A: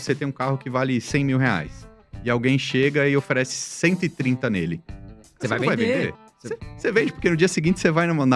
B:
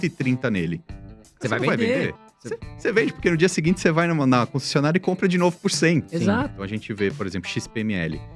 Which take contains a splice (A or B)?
B